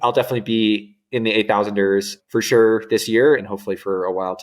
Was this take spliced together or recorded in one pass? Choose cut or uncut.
cut